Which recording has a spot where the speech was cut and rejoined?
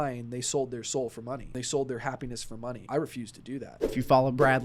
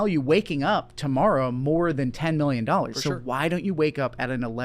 first; 3 cuts; at 1.6 s, 2.8 s, 3.9 s

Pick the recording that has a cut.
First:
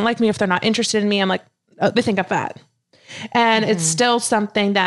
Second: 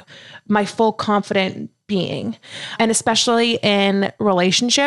second; 1 cut; at 2.8 s

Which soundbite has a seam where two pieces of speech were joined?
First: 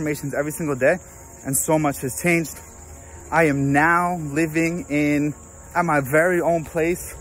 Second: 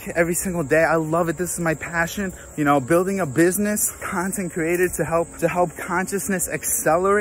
second; 3 cuts; at 2.4 s, 4.1 s, 5.3 s

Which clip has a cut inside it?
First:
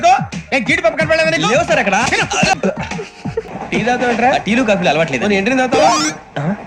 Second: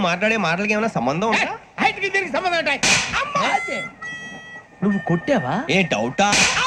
first; 1 cut; at 3.5 s

